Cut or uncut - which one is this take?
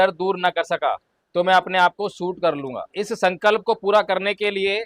cut